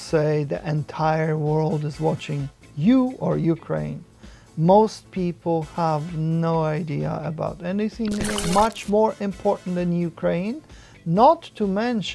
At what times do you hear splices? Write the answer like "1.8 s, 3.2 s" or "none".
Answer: 8.4 s

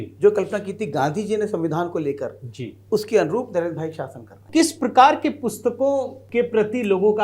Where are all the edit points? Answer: 4.4 s, 6.2 s

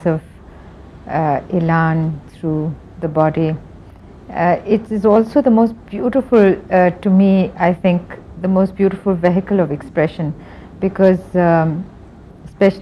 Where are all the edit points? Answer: 6.3 s

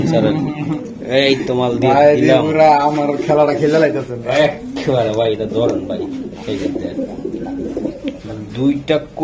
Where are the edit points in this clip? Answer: none

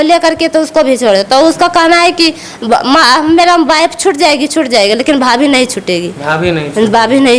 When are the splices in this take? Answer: none

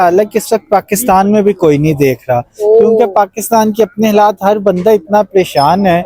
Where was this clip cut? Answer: none

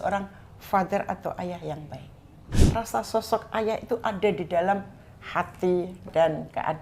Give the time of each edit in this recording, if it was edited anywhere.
2.5 s

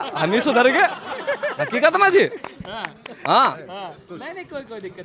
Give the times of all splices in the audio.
none

